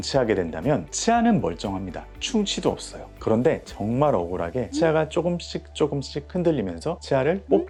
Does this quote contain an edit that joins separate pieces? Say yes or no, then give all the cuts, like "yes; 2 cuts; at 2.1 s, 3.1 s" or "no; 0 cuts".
no; 0 cuts